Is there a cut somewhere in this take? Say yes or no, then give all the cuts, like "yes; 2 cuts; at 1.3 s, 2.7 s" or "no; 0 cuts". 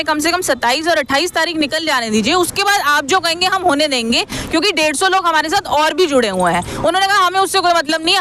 no; 0 cuts